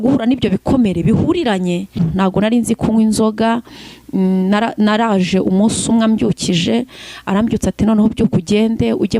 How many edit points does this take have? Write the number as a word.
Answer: one